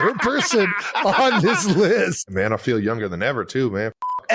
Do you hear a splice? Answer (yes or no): yes